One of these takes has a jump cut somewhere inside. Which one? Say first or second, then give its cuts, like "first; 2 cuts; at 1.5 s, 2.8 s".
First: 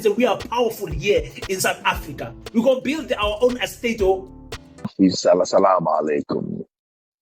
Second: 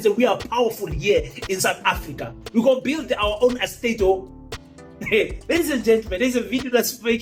first; 1 cut; at 4.9 s